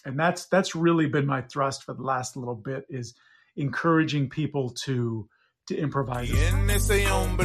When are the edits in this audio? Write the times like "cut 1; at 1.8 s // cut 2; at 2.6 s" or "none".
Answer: cut 1; at 6.2 s